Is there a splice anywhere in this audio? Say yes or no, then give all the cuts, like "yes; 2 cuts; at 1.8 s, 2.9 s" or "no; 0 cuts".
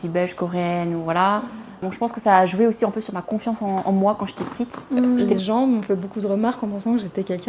yes; 2 cuts; at 1.9 s, 5.3 s